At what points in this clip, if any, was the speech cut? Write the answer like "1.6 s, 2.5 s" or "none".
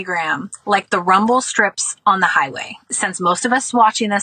2.8 s